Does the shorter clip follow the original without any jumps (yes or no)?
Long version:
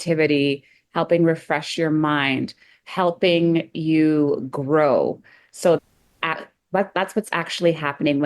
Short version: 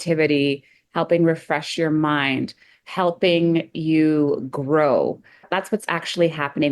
no